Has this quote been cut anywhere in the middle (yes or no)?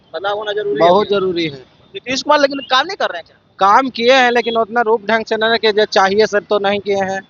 no